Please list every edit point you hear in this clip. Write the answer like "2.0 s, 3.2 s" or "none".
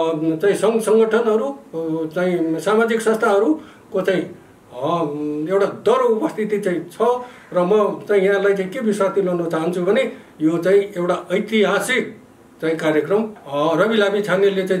13.4 s